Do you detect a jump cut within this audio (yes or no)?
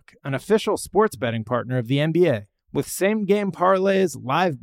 no